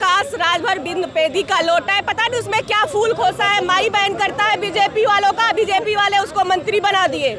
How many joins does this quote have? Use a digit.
0